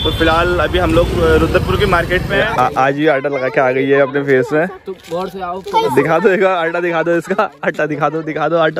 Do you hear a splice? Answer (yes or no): yes